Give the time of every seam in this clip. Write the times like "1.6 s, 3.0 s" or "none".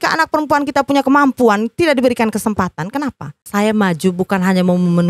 3.4 s